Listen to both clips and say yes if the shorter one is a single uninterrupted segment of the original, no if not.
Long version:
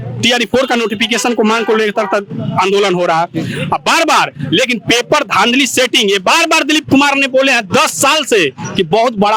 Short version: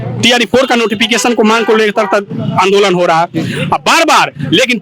yes